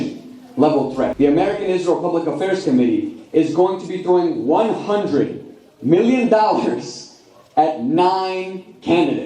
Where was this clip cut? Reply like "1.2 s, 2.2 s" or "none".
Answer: 1.1 s